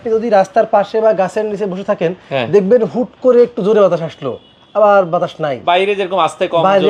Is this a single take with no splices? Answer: yes; 0 cuts

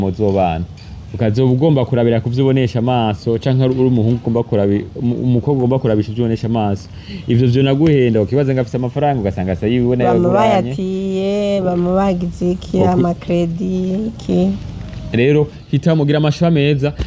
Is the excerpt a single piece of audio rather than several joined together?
yes; 0 cuts

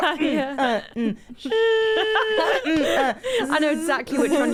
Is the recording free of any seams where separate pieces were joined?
yes; 0 cuts

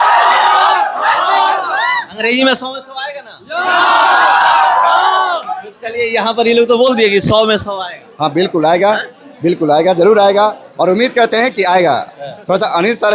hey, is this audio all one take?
yes; 0 cuts

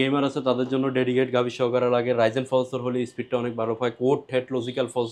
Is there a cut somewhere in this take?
no; 0 cuts

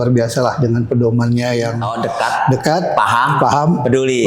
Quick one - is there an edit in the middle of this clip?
yes; 1 cut; at 1.9 s

